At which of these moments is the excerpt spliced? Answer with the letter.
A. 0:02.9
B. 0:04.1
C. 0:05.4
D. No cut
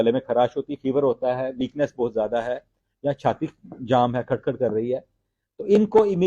D